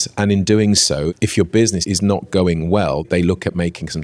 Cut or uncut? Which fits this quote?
cut